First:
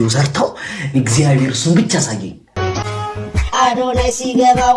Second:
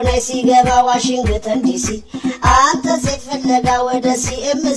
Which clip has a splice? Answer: first; 1 cut; at 2.4 s

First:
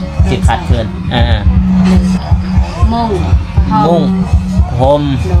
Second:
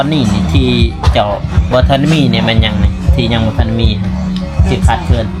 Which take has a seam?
first; 1 cut; at 2.0 s

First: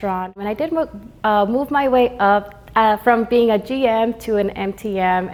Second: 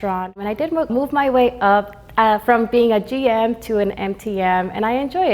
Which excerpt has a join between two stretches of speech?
second; 1 cut; at 0.9 s

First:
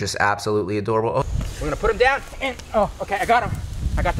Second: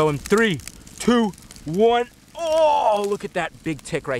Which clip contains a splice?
first; 1 cut; at 1.2 s

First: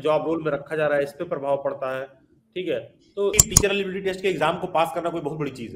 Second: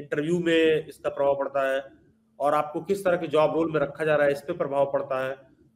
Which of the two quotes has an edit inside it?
first; 1 cut; at 3.4 s

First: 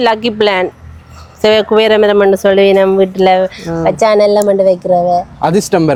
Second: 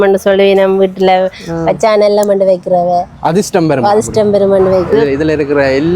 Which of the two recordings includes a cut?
second; 1 cut; at 5.0 s

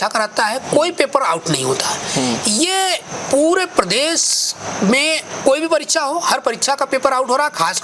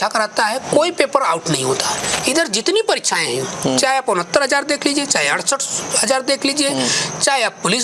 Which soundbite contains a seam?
second; 1 cut; at 2.1 s

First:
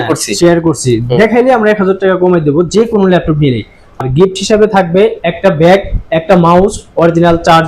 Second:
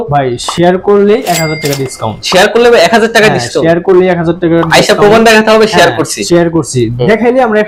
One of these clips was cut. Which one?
first; 1 cut; at 4.0 s

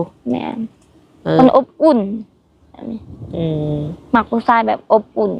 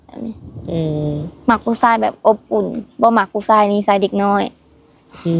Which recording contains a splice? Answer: first; 1 cut; at 1.4 s

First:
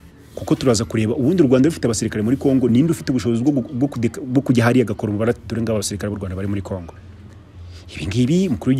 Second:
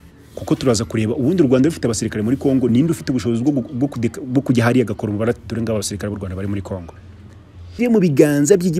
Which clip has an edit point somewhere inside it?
second; 1 cut; at 7.7 s

